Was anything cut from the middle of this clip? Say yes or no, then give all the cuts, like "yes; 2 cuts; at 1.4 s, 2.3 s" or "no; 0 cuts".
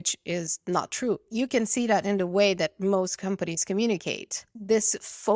yes; 2 cuts; at 1.2 s, 4.4 s